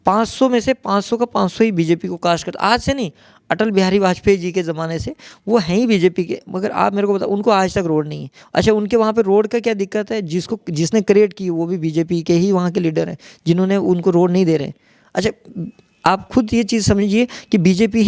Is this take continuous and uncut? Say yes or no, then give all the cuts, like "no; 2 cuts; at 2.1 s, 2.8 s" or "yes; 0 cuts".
yes; 0 cuts